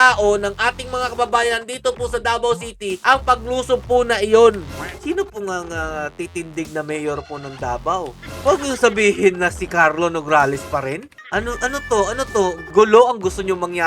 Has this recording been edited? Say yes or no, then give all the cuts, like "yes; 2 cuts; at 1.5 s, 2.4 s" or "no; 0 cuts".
yes; 3 cuts; at 5.0 s, 8.2 s, 11.1 s